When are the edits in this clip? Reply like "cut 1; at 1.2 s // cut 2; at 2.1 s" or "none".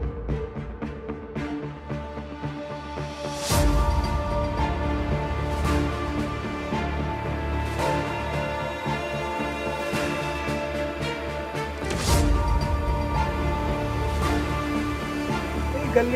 none